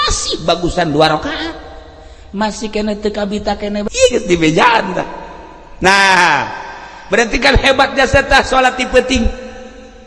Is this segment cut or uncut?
cut